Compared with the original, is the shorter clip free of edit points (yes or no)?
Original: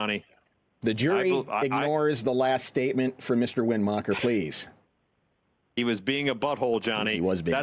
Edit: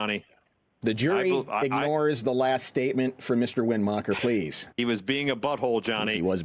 no